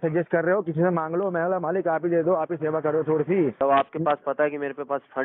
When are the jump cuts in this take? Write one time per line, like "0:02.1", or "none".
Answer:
0:03.6